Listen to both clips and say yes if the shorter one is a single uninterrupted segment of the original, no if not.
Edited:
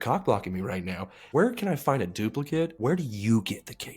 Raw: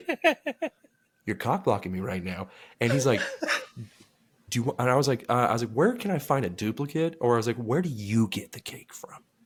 no